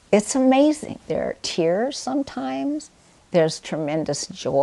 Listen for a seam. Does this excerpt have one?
yes; 1 cut; at 0.9 s

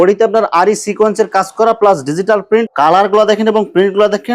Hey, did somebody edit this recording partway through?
yes; 1 cut; at 2.7 s

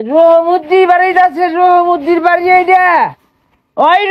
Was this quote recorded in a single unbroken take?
yes; 0 cuts

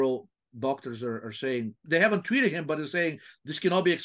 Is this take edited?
yes; 1 cut; at 1.8 s

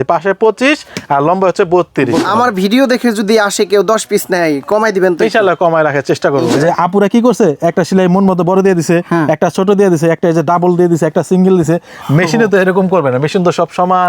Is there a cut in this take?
yes; 2 cuts; at 2.2 s, 6.5 s

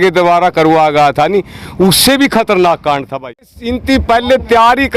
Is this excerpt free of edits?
no; 1 cut; at 3.3 s

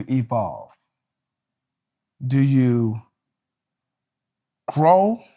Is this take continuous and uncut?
yes; 0 cuts

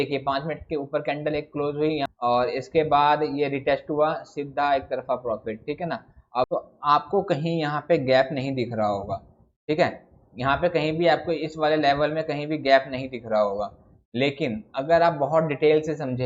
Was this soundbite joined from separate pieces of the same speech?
yes; 2 cuts; at 2.0 s, 6.5 s

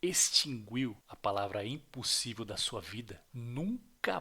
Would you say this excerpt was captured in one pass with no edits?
no; 2 cuts; at 1.1 s, 3.2 s

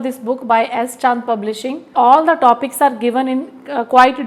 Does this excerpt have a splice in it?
yes; 1 cut; at 1.8 s

